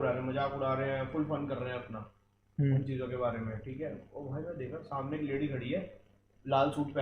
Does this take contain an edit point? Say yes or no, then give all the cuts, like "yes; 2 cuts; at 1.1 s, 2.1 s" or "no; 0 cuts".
no; 0 cuts